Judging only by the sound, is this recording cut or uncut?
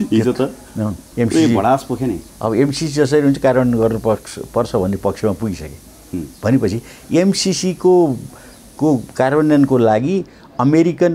cut